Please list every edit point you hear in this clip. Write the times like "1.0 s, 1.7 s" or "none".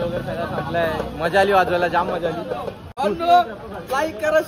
2.9 s